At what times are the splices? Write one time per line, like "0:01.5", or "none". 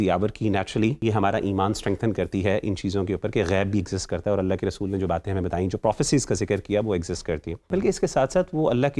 0:01.0
0:07.6